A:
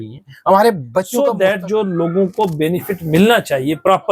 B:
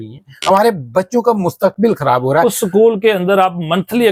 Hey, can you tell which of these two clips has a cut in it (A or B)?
A